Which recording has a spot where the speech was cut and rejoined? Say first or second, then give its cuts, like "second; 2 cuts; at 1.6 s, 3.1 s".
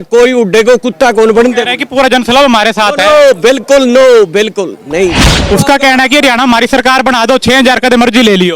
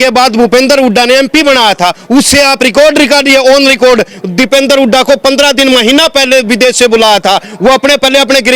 first; 1 cut; at 5.3 s